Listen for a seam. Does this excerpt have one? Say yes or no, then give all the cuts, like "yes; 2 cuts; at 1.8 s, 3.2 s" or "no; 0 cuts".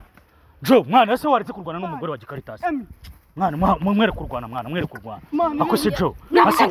no; 0 cuts